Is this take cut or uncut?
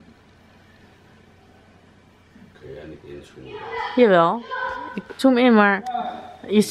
uncut